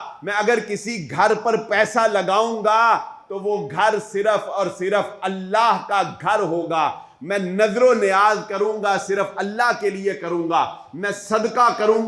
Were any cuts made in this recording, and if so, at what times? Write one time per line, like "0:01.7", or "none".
none